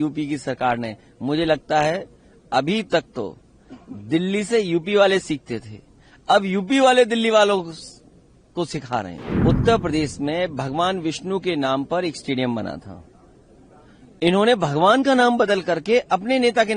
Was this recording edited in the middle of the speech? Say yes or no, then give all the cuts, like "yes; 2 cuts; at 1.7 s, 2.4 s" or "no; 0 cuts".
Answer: yes; 1 cut; at 9.3 s